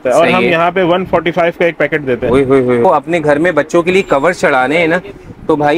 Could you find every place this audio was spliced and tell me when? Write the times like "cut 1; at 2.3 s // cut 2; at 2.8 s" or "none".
cut 1; at 2.8 s